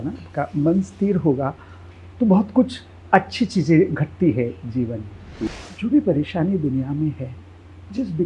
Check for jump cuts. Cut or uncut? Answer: cut